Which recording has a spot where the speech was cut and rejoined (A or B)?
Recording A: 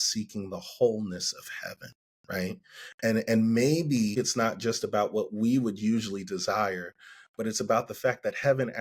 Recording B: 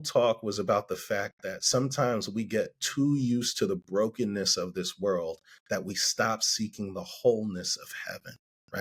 A